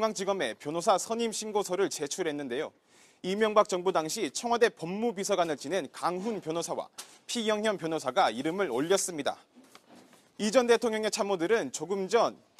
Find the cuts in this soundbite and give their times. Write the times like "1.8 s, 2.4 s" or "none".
none